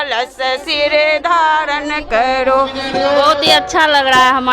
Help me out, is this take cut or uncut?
cut